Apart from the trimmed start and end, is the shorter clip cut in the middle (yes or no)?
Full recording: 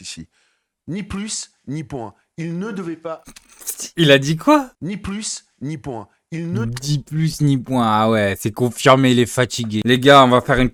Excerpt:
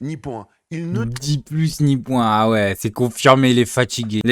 yes